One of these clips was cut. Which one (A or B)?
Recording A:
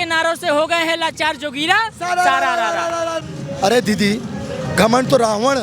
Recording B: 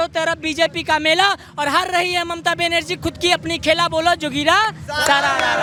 A